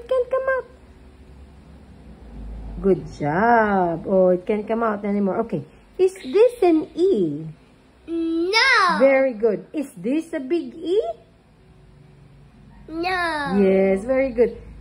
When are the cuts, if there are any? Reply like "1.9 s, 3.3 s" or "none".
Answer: none